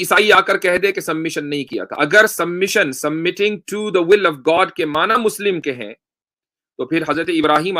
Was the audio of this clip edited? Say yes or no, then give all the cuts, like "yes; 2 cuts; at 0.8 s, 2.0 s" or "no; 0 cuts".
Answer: no; 0 cuts